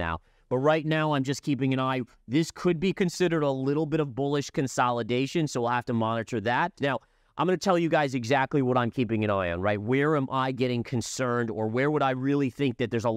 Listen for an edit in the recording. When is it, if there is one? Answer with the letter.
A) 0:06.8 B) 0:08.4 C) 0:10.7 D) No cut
A